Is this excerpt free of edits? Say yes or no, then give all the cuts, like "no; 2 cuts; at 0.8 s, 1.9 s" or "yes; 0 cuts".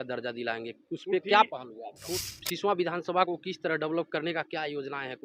no; 1 cut; at 2.2 s